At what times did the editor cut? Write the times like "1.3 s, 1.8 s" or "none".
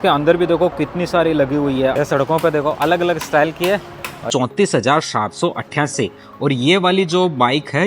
1.9 s, 4.3 s